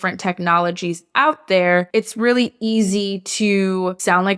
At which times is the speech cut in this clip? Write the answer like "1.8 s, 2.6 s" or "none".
1.9 s